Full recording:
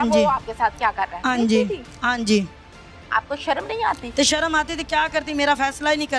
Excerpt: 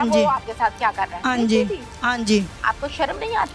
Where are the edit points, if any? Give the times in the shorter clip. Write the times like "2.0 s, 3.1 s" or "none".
2.5 s